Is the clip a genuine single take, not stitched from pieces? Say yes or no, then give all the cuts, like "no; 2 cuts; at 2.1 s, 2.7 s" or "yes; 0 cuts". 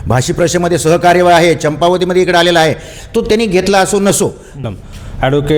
no; 1 cut; at 4.7 s